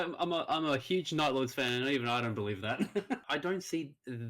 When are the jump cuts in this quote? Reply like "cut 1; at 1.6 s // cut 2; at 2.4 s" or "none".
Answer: cut 1; at 3.2 s